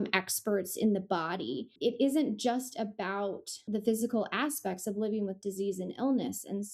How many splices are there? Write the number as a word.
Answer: two